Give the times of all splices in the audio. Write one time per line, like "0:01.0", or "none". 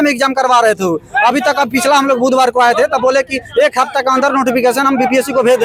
none